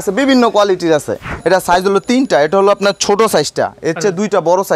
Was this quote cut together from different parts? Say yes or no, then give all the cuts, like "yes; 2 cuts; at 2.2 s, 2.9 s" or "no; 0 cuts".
yes; 1 cut; at 1.3 s